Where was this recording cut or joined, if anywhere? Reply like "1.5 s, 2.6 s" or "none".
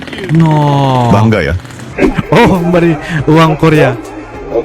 1.9 s